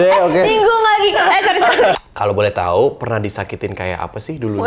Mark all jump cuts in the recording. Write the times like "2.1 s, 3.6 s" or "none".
1.9 s